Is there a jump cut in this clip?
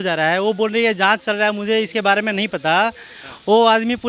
no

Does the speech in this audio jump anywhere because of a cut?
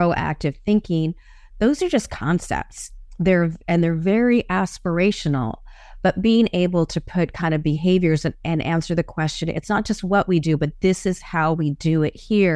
no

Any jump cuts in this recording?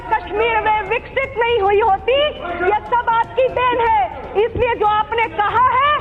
no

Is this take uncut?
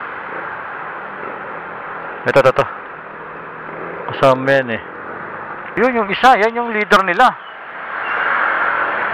no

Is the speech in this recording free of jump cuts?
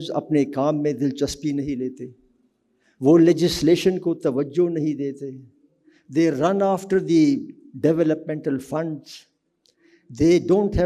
yes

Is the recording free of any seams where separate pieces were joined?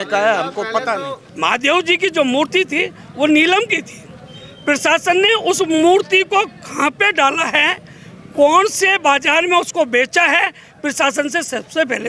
no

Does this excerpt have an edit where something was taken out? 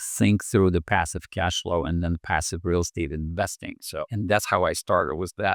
no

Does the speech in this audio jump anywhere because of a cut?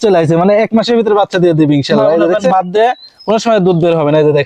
yes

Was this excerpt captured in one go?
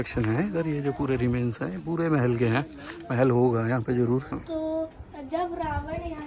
no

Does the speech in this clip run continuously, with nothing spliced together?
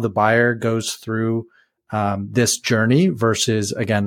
yes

